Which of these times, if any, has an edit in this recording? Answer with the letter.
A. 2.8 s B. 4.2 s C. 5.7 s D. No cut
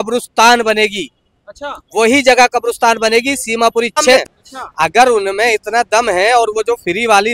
B